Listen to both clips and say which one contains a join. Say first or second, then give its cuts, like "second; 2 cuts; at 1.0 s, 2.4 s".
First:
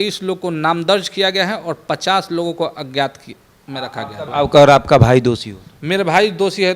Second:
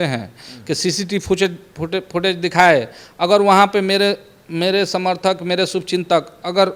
first; 1 cut; at 4.3 s